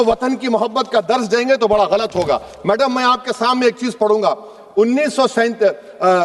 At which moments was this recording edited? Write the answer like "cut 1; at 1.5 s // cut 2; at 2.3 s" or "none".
none